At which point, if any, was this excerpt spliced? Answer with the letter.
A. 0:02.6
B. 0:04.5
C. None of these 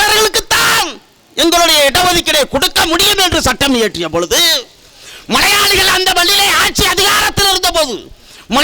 C